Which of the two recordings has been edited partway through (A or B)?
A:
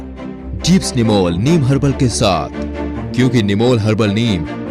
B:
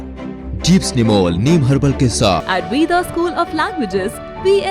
B